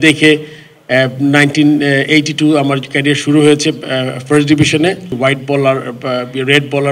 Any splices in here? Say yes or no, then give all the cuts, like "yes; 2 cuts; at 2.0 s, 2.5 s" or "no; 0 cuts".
yes; 1 cut; at 5.2 s